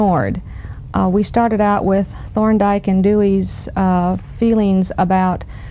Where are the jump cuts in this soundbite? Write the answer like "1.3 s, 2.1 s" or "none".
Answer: none